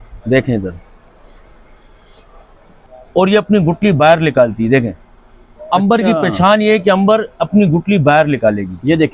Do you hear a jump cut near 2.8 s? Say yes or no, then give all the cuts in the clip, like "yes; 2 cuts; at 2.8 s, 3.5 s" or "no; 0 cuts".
yes; 1 cut; at 2.8 s